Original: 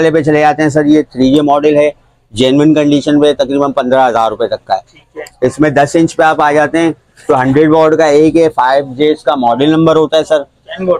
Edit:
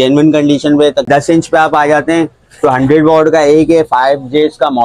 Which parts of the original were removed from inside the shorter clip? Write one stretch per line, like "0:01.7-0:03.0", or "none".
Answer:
0:03.5-0:05.7